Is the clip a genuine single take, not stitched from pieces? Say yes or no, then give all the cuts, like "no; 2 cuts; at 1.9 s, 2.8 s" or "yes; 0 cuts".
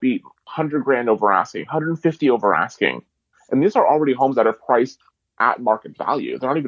yes; 0 cuts